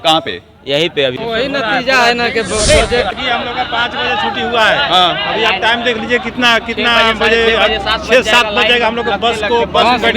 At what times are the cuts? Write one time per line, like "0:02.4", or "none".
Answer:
0:01.2
0:03.1